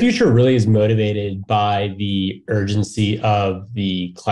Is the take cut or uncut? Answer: uncut